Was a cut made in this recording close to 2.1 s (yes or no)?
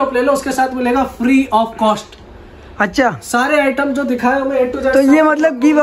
no